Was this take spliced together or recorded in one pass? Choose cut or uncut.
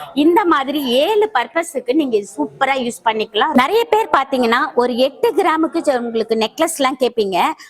cut